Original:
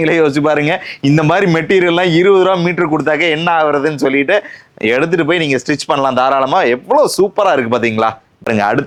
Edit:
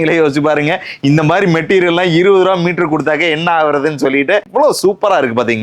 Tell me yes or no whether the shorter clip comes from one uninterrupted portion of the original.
no